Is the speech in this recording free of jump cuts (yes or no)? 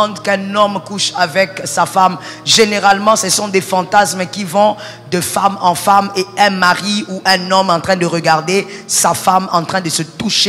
yes